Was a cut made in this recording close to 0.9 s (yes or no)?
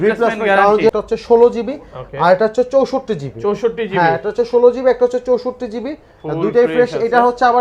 yes